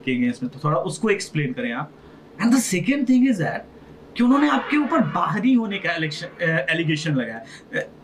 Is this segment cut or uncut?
uncut